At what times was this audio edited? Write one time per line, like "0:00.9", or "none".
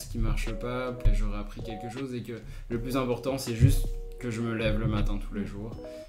none